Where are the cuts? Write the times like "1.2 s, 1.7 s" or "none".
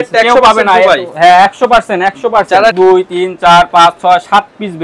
2.7 s